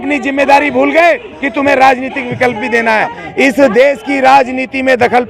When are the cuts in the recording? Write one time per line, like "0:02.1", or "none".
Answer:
0:03.2